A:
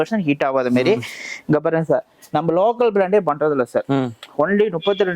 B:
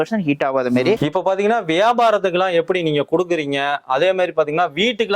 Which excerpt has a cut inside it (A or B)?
B